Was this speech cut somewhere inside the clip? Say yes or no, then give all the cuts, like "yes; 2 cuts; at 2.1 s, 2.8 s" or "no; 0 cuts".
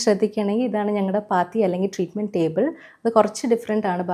no; 0 cuts